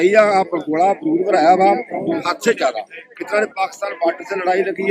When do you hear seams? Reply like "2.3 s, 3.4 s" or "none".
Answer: none